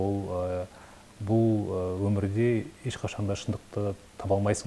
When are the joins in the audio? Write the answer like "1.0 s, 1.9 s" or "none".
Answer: none